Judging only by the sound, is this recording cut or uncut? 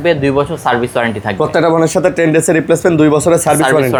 uncut